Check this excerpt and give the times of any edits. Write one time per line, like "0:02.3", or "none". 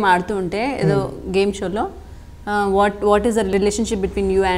0:03.5